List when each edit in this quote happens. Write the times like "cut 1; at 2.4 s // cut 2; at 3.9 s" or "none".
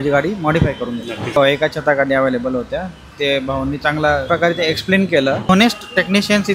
cut 1; at 1.4 s // cut 2; at 4.3 s // cut 3; at 5.5 s